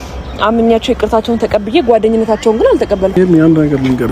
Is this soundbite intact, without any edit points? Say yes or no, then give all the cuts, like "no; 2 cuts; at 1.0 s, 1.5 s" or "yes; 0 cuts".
no; 1 cut; at 3.1 s